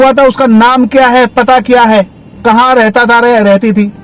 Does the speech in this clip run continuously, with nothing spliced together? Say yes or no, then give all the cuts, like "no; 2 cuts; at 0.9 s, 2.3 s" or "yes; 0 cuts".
yes; 0 cuts